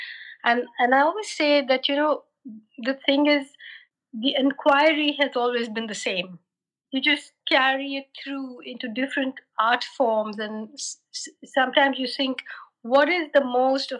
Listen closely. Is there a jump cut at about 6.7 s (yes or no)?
yes